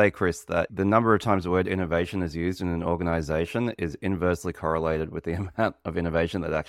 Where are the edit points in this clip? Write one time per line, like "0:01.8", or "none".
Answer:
none